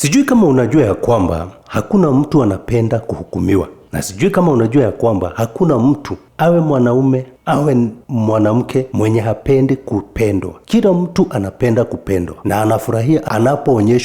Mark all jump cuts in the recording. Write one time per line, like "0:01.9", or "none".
none